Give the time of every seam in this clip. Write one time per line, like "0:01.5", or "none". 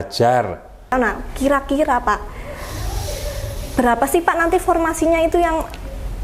0:00.9